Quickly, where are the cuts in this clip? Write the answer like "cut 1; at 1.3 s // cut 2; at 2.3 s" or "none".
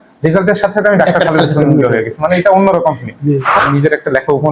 cut 1; at 3.6 s